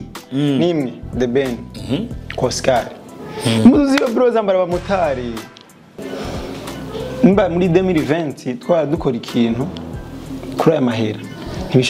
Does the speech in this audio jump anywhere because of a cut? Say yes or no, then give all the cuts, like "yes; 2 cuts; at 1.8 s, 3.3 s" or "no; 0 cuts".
yes; 1 cut; at 5.9 s